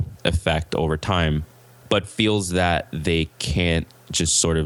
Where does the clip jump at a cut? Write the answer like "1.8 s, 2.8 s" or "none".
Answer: none